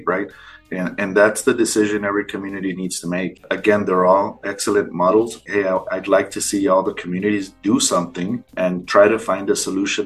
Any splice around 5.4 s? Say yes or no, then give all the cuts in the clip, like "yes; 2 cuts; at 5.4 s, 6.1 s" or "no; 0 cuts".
yes; 2 cuts; at 3.4 s, 5.4 s